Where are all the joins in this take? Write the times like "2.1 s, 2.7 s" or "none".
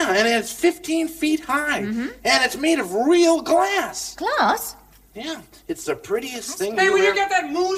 5.4 s